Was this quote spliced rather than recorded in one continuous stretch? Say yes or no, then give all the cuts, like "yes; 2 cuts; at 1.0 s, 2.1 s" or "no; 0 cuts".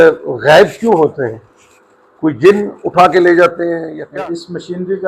yes; 1 cut; at 4.0 s